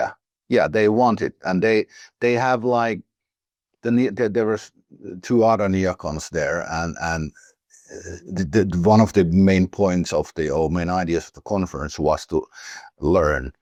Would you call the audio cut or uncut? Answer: uncut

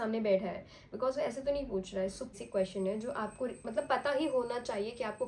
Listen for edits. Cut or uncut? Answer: cut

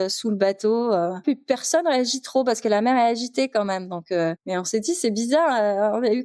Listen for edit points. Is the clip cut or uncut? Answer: cut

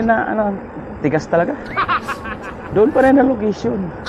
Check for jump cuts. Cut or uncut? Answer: uncut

